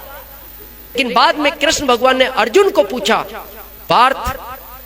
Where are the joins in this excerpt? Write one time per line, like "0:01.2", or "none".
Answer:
0:01.0